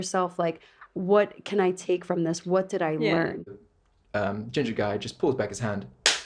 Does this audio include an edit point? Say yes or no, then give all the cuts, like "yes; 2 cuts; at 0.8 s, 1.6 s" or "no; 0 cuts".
yes; 1 cut; at 3.6 s